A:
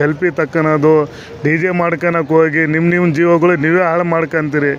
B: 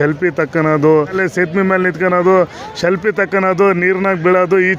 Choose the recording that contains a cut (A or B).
B